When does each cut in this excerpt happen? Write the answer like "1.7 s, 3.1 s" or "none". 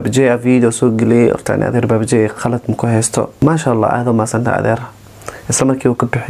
3.3 s